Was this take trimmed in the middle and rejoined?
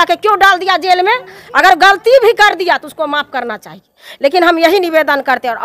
no; 0 cuts

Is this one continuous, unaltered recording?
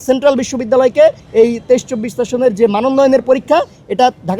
no; 1 cut; at 1.2 s

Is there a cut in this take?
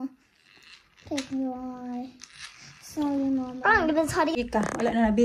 yes; 1 cut; at 4.3 s

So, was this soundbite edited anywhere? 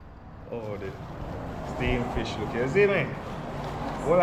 no; 0 cuts

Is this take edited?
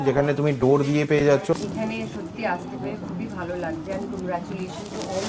yes; 1 cut; at 1.6 s

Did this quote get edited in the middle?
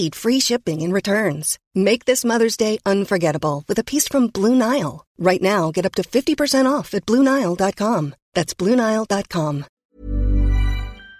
yes; 1 cut; at 9.8 s

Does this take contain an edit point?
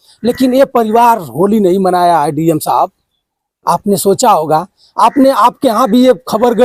no; 0 cuts

